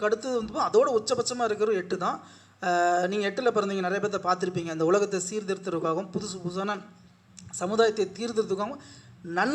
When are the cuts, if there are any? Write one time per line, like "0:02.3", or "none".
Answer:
none